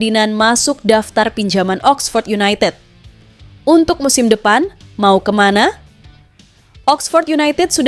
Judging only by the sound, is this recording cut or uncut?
uncut